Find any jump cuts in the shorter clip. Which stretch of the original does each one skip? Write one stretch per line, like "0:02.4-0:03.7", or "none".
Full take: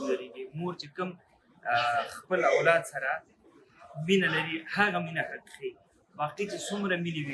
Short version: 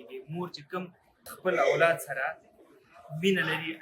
0:01.5-0:02.1